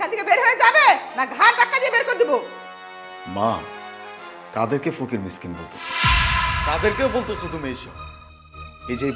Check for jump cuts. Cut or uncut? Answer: uncut